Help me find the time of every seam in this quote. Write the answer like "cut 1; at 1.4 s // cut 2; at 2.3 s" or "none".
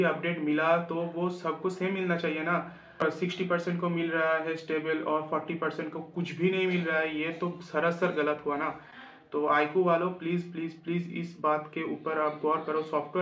cut 1; at 2.9 s